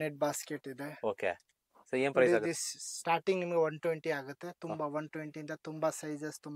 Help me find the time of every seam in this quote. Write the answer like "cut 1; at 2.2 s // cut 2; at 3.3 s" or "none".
none